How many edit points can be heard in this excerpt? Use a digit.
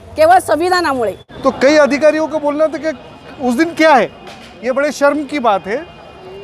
1